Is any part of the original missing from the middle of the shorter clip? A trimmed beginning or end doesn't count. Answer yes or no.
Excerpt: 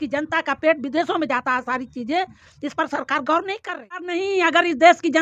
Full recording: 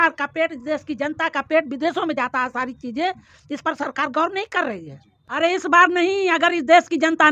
yes